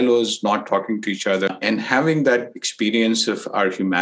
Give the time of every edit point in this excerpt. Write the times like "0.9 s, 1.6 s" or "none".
1.5 s